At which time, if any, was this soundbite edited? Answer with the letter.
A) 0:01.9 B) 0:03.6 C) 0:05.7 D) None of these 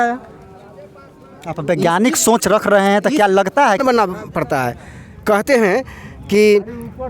B